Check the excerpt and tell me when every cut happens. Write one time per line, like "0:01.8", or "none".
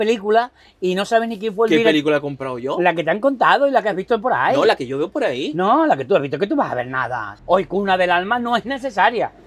0:07.3